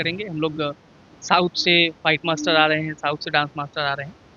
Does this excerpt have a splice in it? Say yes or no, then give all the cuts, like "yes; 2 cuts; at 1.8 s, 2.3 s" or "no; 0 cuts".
no; 0 cuts